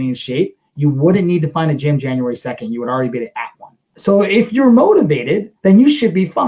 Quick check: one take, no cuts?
no; 2 cuts; at 3.9 s, 5.5 s

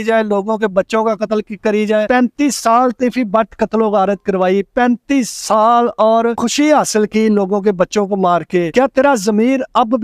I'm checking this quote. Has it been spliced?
yes; 3 cuts; at 2.1 s, 6.4 s, 8.7 s

